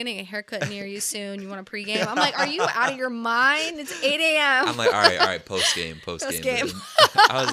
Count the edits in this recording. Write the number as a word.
zero